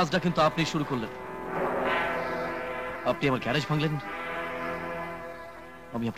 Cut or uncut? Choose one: uncut